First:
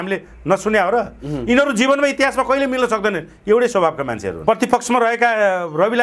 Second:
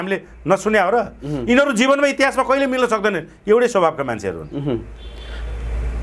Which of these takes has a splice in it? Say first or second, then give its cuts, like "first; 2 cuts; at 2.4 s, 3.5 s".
first; 1 cut; at 4.4 s